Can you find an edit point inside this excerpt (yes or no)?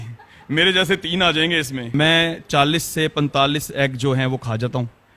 yes